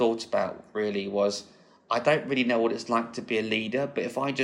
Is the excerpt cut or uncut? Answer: uncut